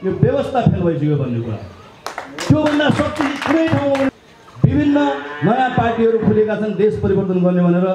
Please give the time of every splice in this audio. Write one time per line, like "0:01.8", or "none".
0:04.2